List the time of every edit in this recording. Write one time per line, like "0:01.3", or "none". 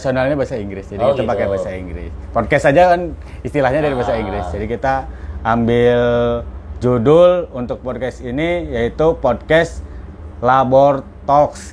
none